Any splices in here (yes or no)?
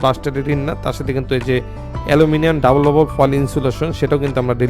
no